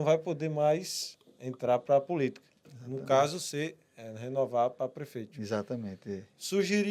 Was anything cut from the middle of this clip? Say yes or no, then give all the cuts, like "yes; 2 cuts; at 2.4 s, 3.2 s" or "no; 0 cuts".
no; 0 cuts